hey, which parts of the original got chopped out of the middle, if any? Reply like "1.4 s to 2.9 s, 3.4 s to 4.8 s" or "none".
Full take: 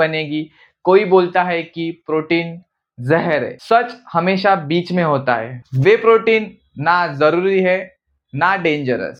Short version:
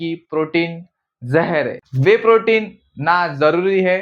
3.6 s to 5.6 s